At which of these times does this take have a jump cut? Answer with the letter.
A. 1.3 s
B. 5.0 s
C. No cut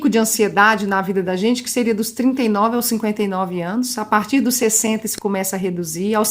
C